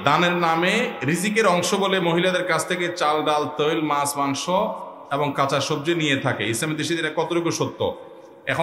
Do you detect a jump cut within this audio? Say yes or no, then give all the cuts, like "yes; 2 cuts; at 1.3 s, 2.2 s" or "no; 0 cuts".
no; 0 cuts